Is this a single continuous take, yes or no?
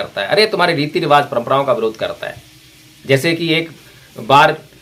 yes